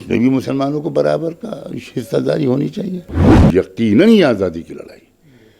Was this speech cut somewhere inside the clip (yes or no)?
yes